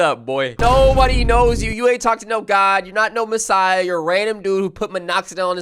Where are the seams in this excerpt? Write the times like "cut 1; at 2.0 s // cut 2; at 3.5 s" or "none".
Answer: none